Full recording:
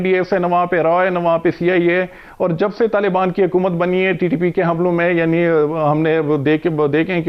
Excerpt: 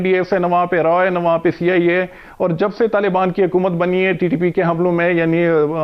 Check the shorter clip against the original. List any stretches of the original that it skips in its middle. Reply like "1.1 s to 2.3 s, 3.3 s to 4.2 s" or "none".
none